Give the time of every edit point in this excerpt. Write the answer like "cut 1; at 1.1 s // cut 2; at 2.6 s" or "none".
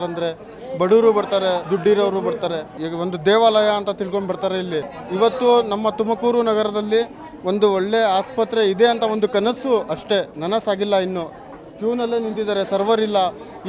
cut 1; at 1.6 s // cut 2; at 2.8 s // cut 3; at 5.0 s // cut 4; at 10.3 s